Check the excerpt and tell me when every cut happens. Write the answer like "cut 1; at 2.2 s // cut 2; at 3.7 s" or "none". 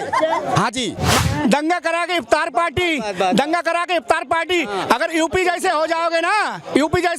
cut 1; at 1.2 s